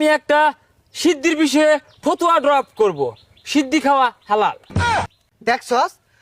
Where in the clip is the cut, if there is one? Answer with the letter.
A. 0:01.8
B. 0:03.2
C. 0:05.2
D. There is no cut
D